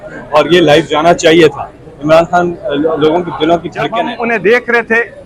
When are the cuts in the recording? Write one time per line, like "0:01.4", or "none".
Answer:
0:04.1